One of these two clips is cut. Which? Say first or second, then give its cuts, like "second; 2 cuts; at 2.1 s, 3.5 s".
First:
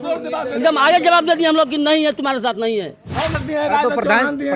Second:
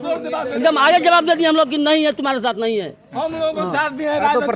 first; 1 cut; at 3.4 s